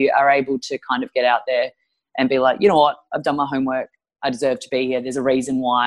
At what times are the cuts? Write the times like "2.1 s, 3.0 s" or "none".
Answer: none